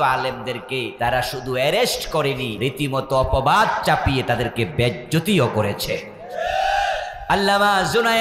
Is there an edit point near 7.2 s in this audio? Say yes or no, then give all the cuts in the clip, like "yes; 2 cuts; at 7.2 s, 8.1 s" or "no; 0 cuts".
yes; 3 cuts; at 0.9 s, 2.5 s, 7.2 s